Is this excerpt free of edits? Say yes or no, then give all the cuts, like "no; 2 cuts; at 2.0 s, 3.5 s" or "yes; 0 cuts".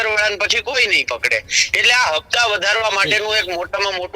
yes; 0 cuts